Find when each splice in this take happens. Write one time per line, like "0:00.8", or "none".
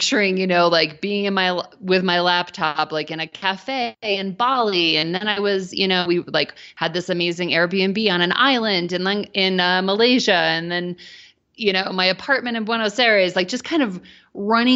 none